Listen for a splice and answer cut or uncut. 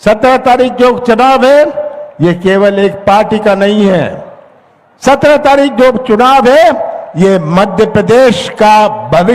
uncut